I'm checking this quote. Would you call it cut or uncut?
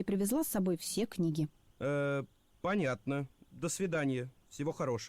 cut